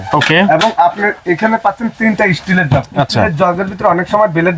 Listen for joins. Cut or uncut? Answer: uncut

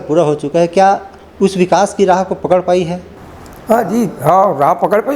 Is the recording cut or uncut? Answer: uncut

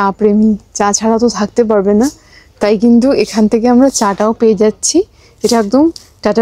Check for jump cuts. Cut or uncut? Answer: uncut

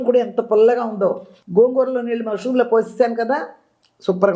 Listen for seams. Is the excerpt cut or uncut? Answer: uncut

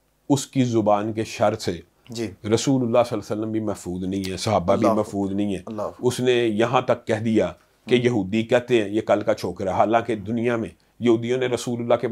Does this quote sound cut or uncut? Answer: uncut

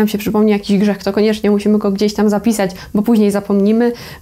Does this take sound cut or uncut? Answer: uncut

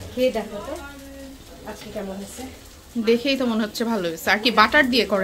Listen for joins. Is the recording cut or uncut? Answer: uncut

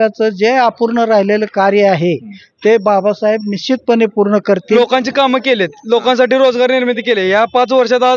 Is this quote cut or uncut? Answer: cut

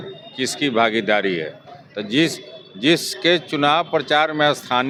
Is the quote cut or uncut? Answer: uncut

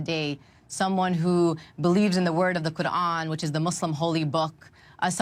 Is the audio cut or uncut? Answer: uncut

